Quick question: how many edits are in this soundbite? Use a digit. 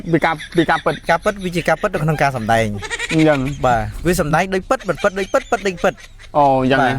1